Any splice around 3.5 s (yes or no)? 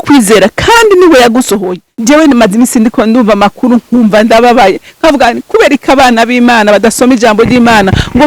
no